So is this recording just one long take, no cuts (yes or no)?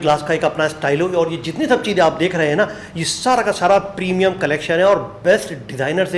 yes